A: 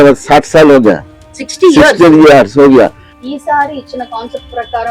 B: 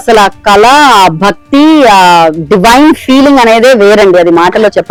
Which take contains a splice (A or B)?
A